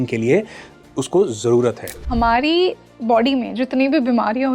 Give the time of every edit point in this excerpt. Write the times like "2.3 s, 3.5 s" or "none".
2.0 s